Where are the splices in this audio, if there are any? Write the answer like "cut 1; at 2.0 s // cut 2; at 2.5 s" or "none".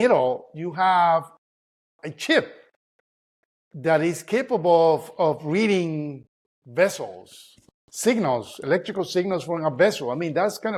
none